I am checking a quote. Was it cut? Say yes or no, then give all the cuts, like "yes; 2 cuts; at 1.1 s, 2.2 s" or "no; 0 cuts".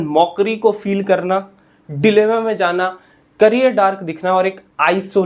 no; 0 cuts